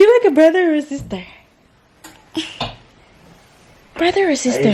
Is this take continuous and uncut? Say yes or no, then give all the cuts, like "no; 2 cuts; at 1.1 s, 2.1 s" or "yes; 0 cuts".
yes; 0 cuts